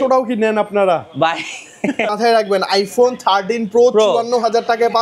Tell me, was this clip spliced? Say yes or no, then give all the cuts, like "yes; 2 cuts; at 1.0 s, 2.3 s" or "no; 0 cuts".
yes; 1 cut; at 2.1 s